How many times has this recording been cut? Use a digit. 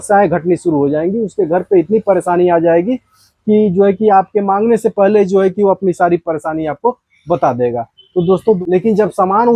1